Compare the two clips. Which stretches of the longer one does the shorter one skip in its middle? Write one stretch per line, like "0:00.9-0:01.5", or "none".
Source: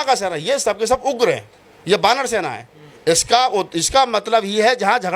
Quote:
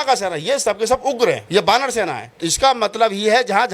0:01.4-0:01.8
0:02.8-0:03.8